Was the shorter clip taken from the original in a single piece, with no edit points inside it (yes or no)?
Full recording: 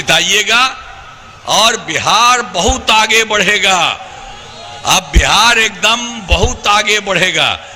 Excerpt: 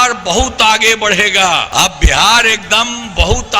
no